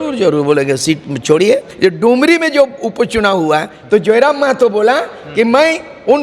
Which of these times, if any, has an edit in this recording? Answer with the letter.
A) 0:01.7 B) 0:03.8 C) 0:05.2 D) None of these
A